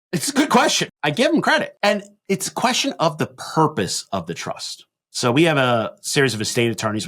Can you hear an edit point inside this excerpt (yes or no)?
yes